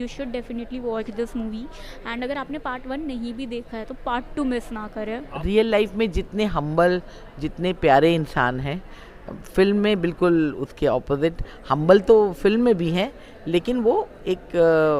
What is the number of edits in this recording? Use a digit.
1